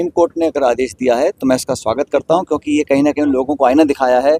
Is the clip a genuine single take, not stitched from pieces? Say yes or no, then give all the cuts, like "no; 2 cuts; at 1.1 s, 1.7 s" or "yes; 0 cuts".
yes; 0 cuts